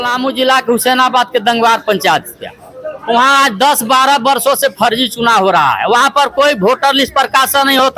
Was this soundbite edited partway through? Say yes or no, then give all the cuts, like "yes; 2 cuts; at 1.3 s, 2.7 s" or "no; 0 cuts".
no; 0 cuts